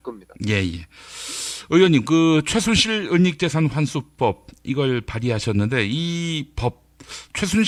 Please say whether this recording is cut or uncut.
uncut